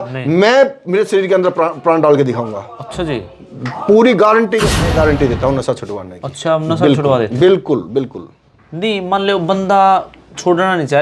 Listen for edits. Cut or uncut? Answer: cut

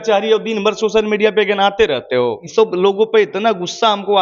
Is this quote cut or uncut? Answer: cut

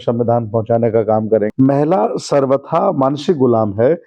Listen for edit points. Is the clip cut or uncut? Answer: cut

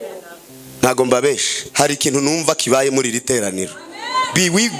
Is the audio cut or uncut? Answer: uncut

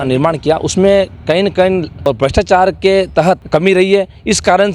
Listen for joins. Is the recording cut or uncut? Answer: cut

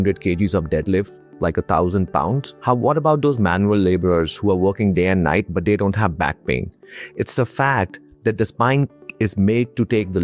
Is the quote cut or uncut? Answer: uncut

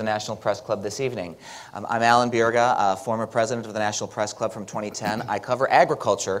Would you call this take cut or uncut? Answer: uncut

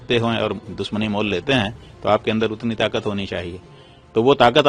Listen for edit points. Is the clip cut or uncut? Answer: uncut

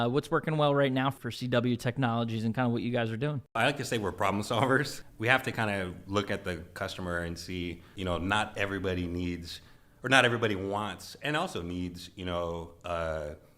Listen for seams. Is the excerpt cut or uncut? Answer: cut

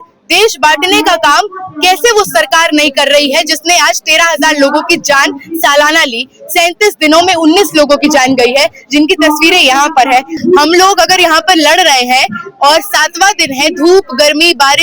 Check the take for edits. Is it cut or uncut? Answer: cut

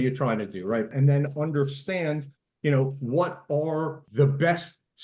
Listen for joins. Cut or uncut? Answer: cut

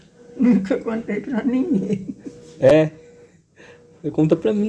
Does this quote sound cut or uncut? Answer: uncut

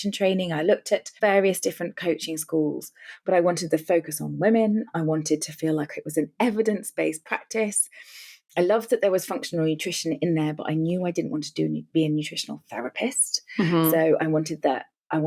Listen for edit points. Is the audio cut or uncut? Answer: uncut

